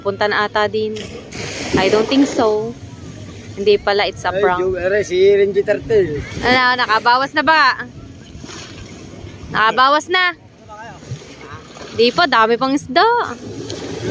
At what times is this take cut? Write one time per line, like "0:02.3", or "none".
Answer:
none